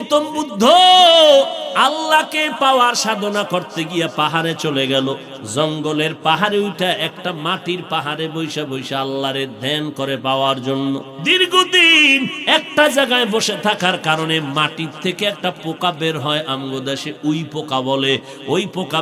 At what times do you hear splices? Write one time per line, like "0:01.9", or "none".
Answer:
0:01.6
0:05.3
0:11.1